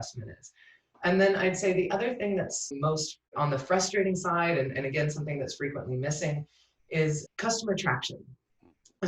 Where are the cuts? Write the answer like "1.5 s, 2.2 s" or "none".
3.1 s, 7.2 s